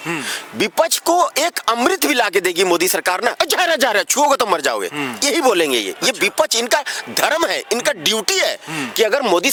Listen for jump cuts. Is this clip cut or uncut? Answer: uncut